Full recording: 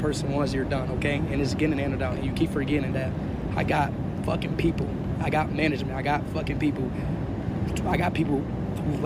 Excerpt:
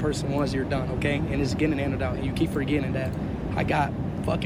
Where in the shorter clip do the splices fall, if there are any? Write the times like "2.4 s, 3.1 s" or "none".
none